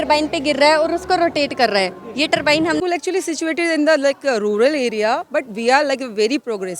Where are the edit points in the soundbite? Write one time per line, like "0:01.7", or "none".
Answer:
0:02.8